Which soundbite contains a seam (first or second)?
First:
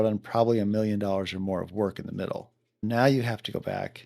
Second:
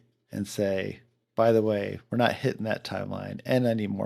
first